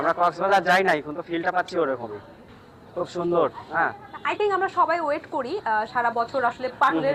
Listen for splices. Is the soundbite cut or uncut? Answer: uncut